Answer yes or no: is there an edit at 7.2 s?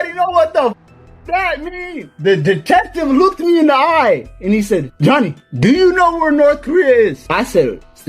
no